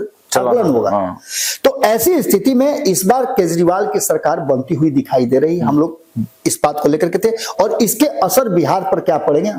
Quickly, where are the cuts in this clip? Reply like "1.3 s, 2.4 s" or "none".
none